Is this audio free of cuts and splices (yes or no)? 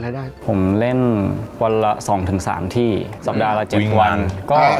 yes